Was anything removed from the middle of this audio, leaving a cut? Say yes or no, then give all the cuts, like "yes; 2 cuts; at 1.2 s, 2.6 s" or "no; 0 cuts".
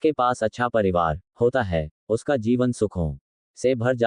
yes; 1 cut; at 1.2 s